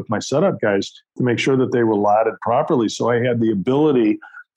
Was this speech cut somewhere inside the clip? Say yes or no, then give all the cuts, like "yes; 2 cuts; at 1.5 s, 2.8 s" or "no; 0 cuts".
no; 0 cuts